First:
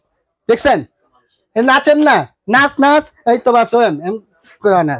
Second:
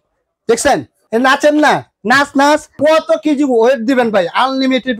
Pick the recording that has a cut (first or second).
second